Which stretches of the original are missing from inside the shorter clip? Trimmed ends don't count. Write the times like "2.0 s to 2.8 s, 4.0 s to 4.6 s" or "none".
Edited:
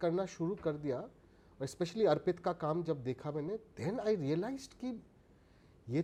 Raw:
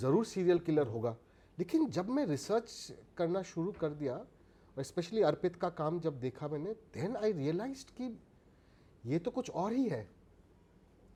none